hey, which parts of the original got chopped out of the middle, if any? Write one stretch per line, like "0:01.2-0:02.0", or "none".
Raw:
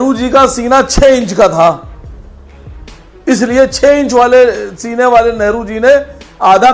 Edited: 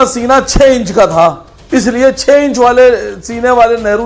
0:01.9-0:03.1